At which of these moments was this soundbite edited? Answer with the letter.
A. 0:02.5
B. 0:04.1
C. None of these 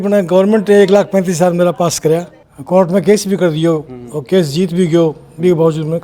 A